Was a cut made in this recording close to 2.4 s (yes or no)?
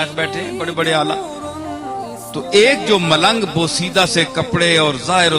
yes